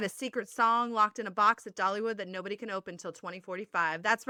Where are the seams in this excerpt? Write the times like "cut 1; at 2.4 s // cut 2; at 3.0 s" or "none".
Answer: none